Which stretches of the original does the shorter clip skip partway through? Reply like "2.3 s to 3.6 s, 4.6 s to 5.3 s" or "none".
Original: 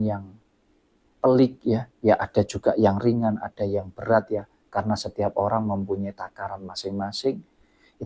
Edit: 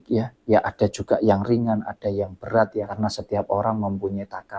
4.5 s to 4.8 s